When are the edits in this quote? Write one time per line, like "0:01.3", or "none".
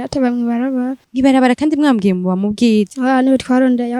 0:01.0
0:02.9